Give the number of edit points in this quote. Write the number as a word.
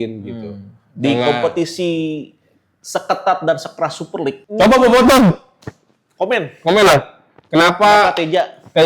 one